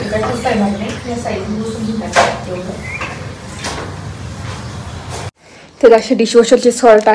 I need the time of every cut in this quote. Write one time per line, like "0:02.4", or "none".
0:05.4